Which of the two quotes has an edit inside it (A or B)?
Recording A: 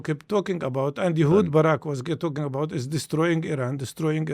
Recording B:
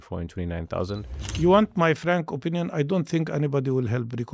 B